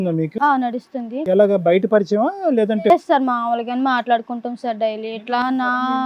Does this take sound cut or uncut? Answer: uncut